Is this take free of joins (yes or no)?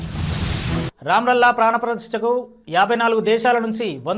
yes